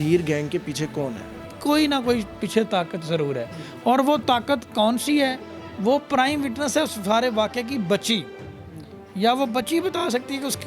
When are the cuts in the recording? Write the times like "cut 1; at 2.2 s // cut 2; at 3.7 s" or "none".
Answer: none